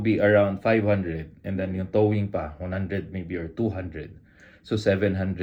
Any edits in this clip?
no; 0 cuts

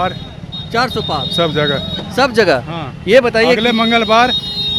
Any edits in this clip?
no; 0 cuts

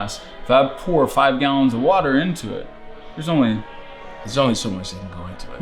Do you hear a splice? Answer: no; 0 cuts

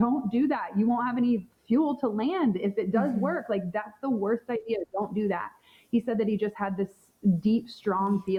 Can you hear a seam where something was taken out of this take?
no; 0 cuts

